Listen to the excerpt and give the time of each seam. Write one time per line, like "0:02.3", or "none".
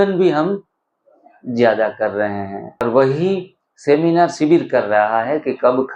0:02.8